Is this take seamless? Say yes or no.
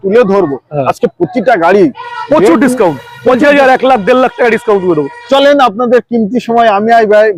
yes